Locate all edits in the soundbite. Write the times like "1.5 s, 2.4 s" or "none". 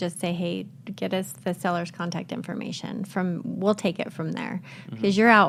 none